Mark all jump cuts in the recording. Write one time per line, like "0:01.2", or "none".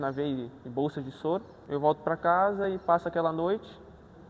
0:01.6